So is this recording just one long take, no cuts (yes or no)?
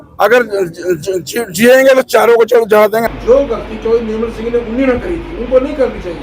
no